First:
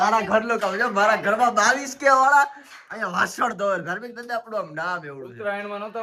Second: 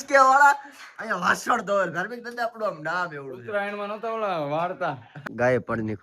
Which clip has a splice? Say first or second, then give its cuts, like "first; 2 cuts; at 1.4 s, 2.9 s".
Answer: second; 1 cut; at 5.1 s